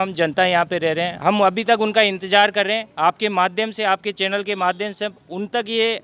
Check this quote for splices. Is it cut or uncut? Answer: cut